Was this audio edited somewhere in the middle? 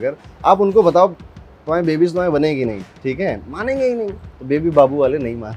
yes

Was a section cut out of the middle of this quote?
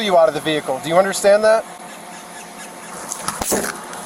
yes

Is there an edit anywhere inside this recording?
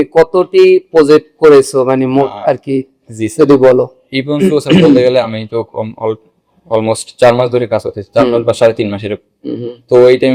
no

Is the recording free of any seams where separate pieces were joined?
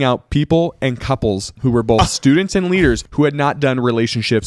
no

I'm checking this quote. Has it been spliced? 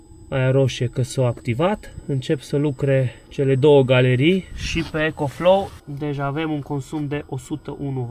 yes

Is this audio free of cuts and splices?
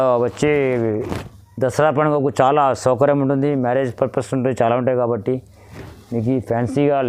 yes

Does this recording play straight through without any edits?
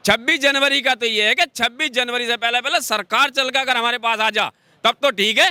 yes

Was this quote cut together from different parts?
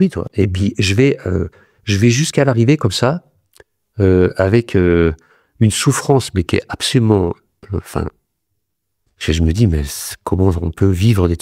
no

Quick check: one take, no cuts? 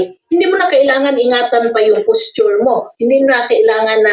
yes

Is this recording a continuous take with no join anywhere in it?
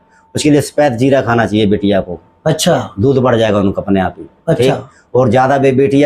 yes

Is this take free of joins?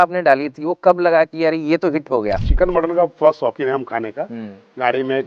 no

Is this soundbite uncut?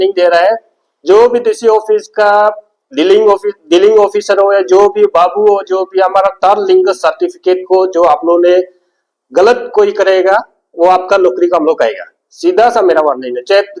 yes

